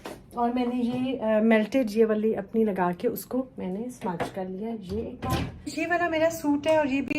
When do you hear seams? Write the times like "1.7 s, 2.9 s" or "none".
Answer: 5.7 s